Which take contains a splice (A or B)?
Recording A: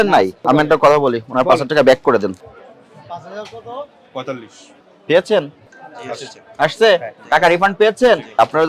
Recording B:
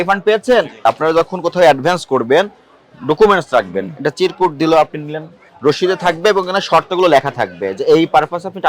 B